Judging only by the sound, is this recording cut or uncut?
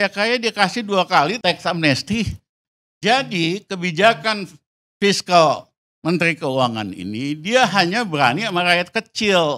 cut